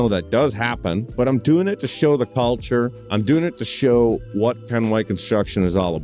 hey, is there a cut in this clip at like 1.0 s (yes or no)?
yes